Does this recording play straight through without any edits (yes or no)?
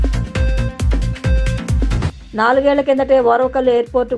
no